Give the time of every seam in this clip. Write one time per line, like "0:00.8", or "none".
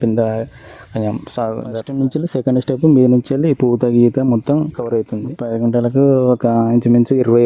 0:01.7
0:05.2